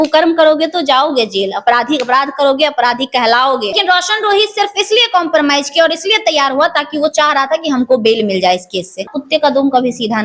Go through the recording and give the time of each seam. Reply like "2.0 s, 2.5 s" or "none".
3.8 s, 9.2 s